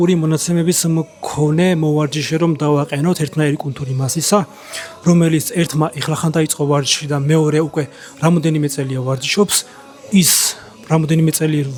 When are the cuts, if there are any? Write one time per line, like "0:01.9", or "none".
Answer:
none